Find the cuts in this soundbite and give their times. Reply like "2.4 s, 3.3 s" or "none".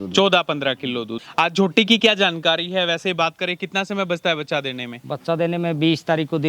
1.2 s